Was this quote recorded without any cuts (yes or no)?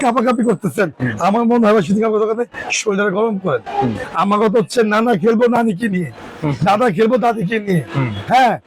no